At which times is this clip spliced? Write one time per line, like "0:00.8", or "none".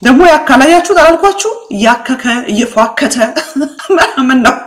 none